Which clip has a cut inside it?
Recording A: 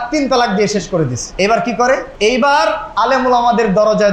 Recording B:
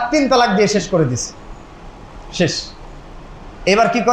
A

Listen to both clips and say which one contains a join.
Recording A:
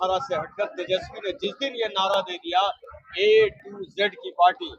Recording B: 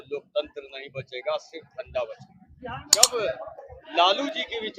B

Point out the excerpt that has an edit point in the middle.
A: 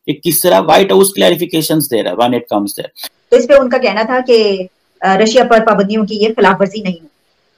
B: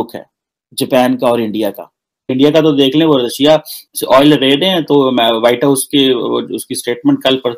B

